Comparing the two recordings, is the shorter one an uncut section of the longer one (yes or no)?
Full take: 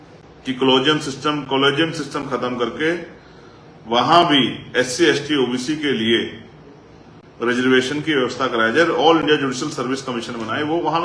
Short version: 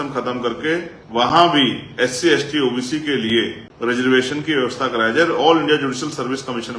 no